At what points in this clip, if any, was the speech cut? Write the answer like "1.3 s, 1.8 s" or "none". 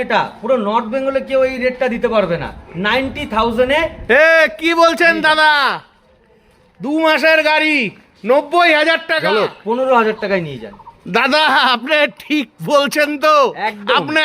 9.3 s